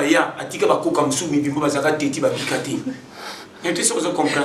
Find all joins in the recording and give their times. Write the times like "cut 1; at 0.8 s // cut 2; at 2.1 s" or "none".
none